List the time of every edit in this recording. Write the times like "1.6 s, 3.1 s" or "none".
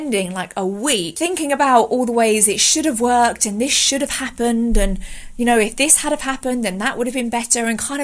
1.1 s